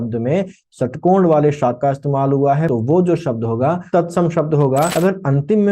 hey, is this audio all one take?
no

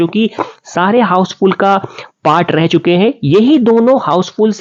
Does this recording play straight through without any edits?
yes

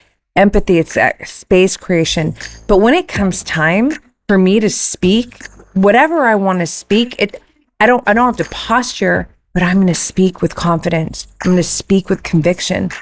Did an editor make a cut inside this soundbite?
no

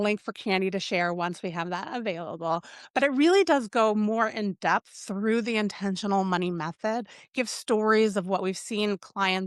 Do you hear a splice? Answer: no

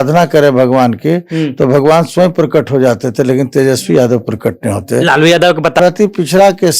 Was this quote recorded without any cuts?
no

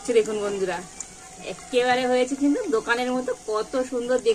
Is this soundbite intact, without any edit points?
yes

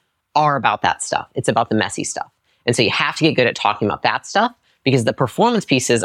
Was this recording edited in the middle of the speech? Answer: no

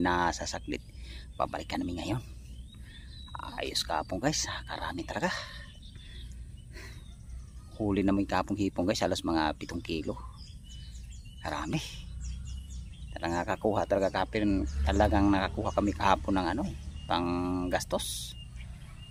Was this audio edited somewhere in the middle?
no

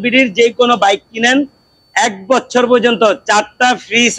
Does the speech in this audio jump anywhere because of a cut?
no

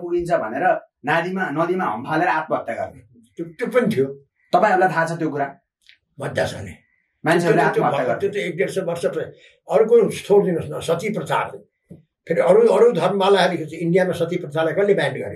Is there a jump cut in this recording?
no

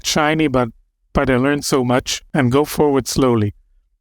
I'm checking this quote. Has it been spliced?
yes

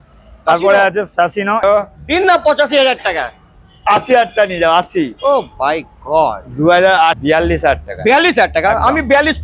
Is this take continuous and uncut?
no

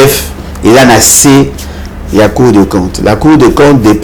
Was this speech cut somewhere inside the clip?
no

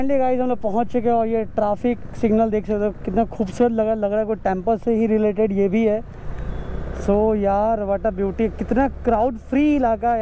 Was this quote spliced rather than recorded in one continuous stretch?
no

